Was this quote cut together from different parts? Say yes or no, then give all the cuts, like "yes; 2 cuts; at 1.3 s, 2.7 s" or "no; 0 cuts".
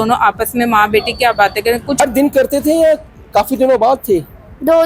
yes; 1 cut; at 2.0 s